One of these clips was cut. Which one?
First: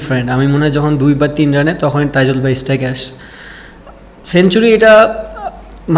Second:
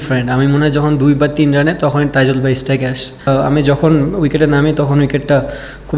second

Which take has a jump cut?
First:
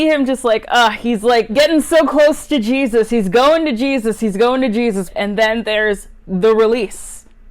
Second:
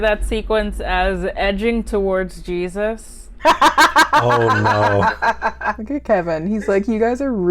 second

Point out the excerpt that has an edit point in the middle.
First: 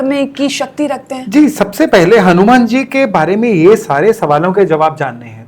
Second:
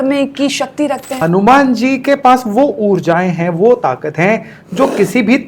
second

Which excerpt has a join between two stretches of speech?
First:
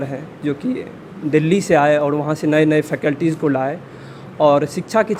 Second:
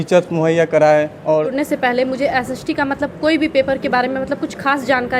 second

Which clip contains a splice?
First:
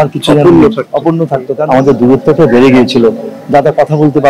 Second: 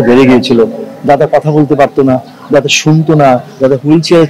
first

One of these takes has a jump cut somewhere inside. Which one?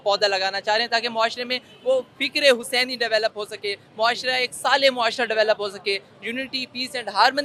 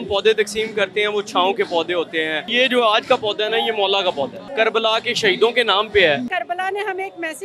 second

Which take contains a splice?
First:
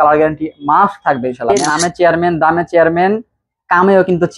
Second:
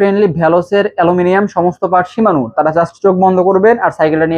first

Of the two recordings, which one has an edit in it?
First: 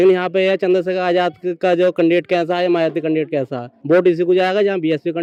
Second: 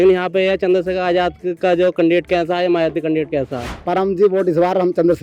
second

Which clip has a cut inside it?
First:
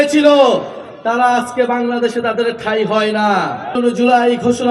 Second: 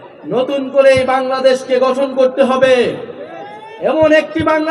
first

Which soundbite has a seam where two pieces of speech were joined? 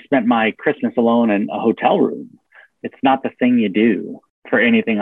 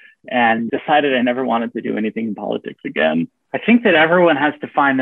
second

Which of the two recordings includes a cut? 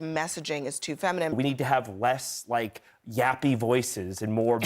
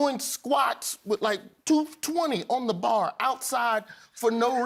first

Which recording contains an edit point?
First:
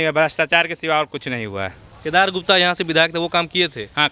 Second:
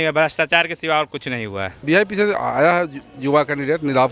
second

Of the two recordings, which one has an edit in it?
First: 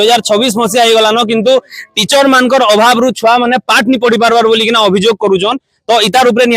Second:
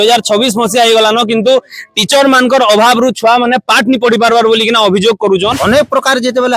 second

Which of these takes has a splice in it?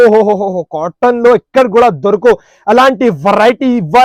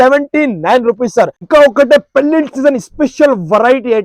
second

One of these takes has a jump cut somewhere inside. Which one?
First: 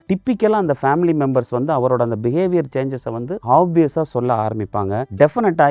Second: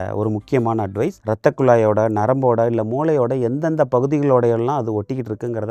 second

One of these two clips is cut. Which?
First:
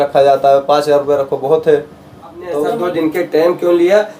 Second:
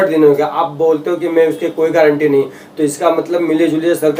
first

